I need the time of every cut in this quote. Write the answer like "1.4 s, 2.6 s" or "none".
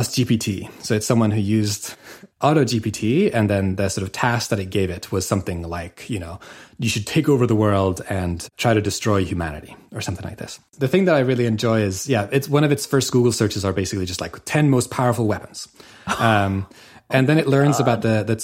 10.6 s

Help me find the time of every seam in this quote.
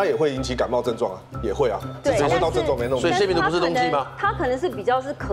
none

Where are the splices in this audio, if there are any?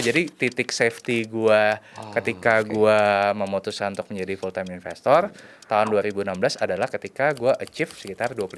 none

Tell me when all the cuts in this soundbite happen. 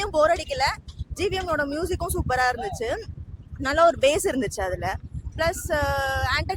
none

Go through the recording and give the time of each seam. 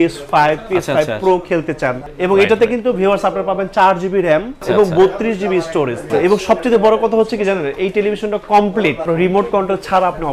2.1 s, 4.5 s, 6.1 s, 9.0 s

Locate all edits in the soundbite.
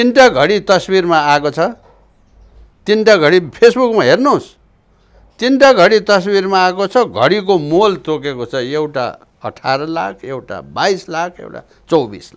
none

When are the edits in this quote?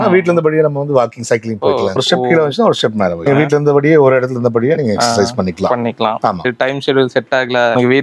none

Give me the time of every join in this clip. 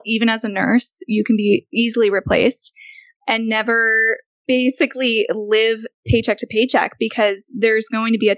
none

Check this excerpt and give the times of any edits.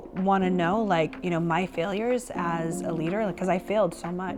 none

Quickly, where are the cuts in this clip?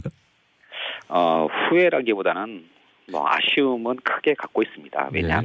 3.5 s

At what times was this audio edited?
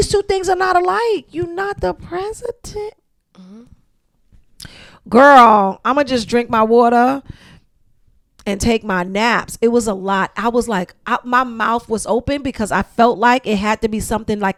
none

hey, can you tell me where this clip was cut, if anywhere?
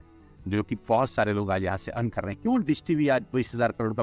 none

